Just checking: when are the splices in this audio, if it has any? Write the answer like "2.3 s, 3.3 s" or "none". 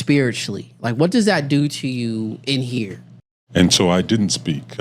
3.1 s